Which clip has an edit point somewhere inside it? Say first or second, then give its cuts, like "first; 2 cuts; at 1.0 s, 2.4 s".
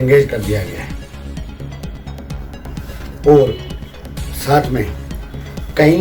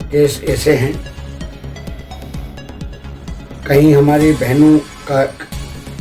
second; 2 cuts; at 1.4 s, 3.6 s